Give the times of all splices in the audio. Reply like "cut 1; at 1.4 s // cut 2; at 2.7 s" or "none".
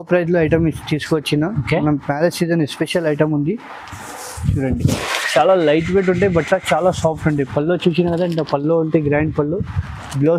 none